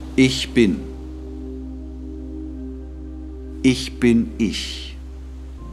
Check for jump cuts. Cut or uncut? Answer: cut